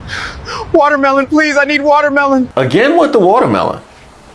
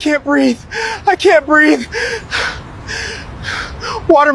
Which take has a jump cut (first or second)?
first